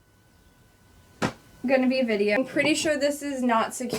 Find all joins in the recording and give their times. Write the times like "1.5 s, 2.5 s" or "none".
2.4 s